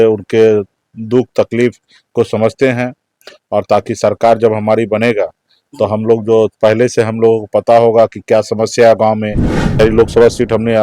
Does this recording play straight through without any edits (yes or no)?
no